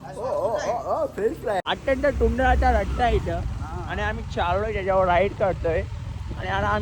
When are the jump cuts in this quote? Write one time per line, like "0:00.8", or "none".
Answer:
0:01.6